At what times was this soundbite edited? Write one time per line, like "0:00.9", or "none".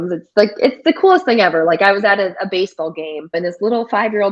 0:03.4